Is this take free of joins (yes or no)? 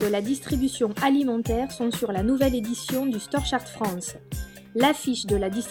yes